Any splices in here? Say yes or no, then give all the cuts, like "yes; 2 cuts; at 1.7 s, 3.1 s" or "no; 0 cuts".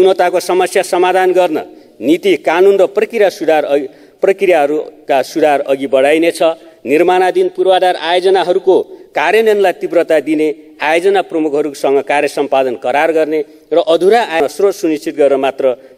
yes; 1 cut; at 14.4 s